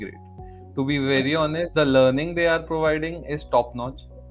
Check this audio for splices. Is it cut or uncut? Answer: uncut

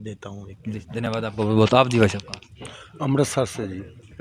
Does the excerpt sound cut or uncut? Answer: uncut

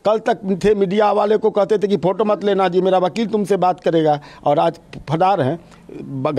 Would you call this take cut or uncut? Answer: uncut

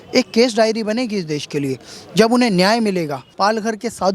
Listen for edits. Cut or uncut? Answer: cut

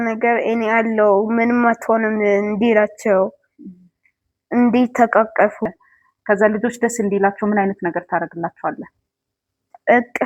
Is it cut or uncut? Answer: cut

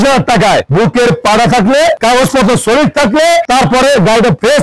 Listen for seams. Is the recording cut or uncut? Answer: uncut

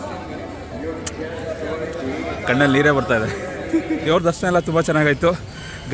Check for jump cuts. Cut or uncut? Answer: cut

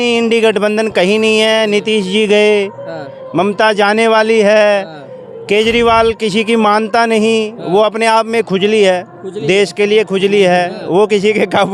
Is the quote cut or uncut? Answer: uncut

